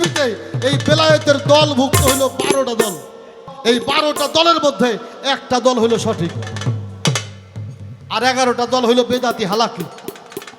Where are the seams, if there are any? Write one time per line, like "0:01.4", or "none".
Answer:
0:03.4